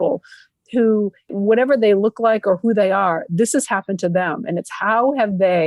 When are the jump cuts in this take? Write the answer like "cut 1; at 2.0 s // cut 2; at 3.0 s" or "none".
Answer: cut 1; at 1.3 s